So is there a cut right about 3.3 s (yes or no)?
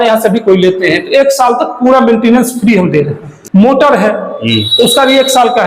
yes